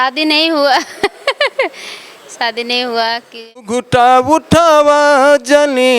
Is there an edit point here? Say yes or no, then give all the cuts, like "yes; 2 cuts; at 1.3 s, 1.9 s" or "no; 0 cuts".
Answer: yes; 1 cut; at 3.8 s